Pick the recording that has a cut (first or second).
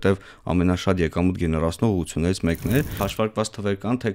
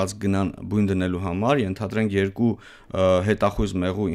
first